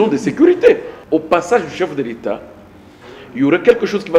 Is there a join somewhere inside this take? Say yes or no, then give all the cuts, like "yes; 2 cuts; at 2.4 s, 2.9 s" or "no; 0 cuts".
yes; 1 cut; at 0.9 s